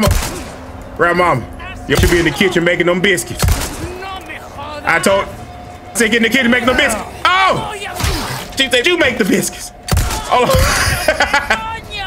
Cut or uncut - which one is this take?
cut